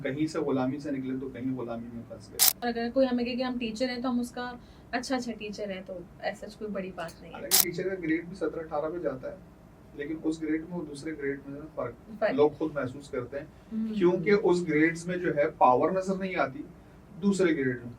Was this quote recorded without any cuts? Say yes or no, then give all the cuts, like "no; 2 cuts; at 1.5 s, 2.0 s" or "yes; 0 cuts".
no; 1 cut; at 2.6 s